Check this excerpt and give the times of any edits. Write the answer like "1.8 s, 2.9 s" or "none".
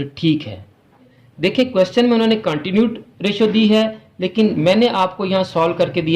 1.2 s